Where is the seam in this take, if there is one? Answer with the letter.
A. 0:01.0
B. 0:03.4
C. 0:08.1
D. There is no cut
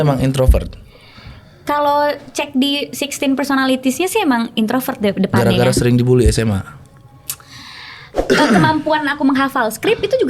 C